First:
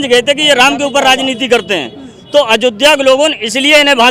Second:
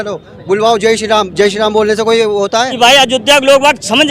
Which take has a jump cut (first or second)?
second